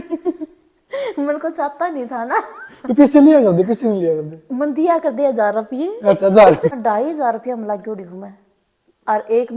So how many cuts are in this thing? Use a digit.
1